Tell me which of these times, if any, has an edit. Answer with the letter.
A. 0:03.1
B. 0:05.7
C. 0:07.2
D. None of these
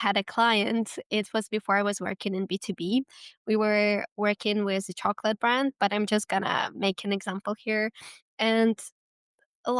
D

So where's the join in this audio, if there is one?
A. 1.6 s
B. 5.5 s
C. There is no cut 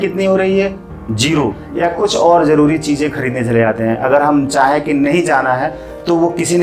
A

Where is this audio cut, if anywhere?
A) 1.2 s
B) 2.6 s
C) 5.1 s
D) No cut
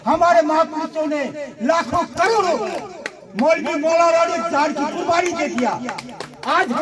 D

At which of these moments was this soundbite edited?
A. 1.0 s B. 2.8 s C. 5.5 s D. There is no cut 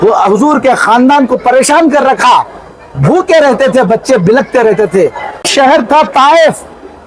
C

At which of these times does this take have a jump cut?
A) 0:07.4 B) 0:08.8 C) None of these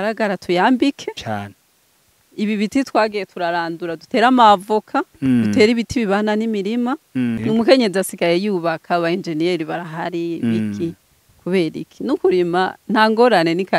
A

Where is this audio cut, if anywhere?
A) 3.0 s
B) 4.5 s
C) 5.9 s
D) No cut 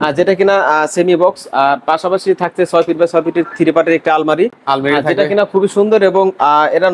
D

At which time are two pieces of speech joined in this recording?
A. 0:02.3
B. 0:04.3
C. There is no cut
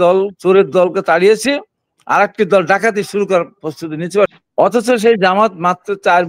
B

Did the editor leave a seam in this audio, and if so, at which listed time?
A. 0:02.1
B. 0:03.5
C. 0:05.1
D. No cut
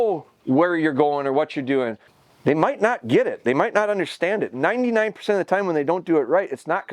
A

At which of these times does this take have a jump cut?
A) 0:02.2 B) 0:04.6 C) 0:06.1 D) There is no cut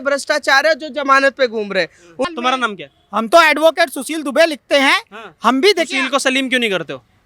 A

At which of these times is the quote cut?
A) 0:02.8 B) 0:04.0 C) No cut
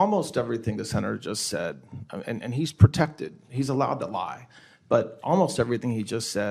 C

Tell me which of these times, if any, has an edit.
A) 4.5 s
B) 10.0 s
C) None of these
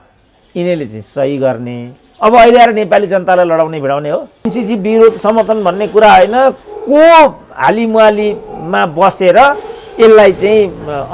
A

